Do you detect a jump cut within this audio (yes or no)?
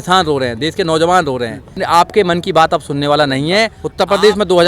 yes